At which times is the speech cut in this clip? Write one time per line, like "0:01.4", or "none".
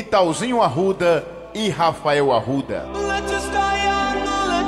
0:03.5